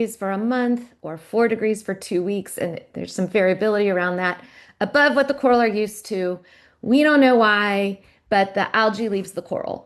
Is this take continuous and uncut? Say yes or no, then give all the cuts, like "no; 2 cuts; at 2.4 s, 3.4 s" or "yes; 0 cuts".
yes; 0 cuts